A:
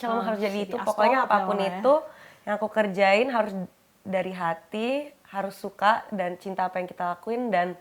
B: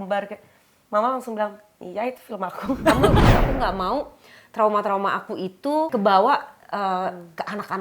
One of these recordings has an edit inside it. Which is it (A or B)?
B